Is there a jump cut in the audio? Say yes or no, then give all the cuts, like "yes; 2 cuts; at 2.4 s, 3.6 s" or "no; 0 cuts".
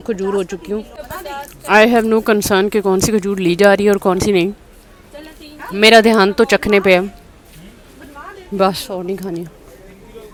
no; 0 cuts